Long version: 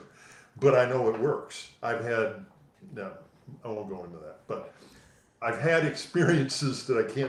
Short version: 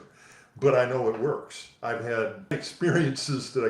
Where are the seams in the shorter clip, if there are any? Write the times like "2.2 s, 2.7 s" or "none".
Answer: 2.5 s

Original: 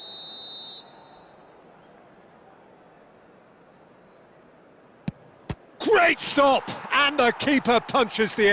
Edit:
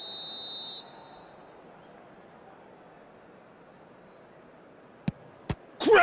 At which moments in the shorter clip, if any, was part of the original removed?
none

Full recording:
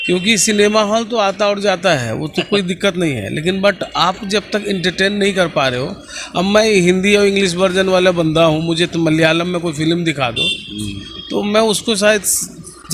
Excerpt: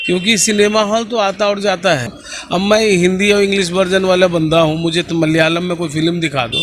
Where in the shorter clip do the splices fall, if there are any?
2.2 s

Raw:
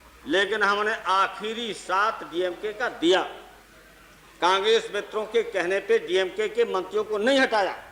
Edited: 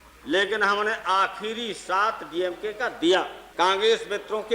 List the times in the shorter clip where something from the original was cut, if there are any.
3.4 s

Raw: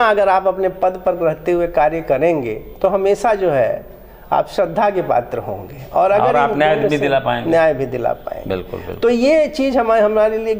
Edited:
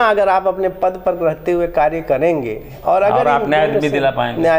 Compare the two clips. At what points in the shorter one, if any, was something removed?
2.6 s

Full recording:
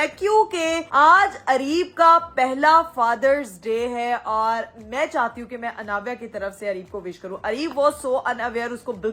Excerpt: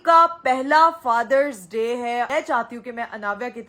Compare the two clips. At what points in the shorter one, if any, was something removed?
2.3 s

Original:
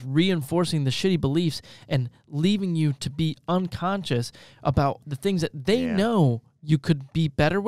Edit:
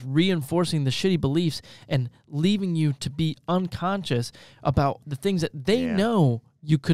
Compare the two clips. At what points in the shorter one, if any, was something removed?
none

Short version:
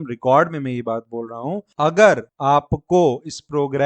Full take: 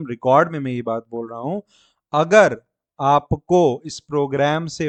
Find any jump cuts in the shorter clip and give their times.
1.7 s, 2.3 s

